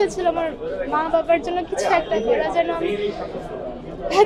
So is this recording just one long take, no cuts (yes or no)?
yes